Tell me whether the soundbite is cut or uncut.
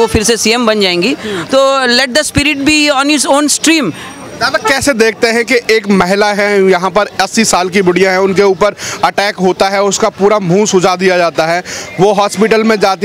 uncut